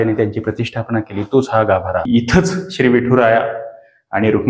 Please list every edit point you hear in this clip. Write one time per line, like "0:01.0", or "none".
0:02.1